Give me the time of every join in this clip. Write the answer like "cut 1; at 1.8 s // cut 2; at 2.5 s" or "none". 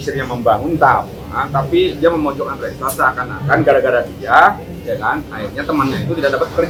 none